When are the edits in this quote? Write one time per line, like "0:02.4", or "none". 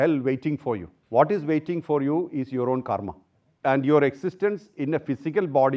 0:00.9
0:03.5